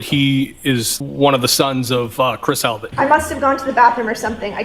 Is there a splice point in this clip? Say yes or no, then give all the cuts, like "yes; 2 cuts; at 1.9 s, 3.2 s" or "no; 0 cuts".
yes; 2 cuts; at 1.0 s, 2.8 s